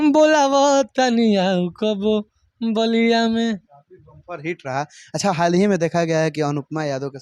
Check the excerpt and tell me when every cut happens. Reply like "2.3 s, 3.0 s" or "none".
none